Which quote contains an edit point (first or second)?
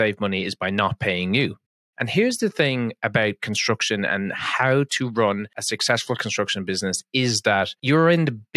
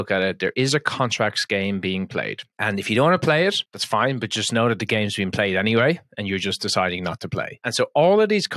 first